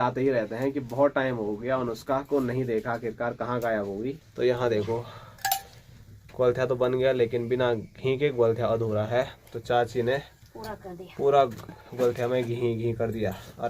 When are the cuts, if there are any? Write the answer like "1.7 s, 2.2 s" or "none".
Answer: 4.2 s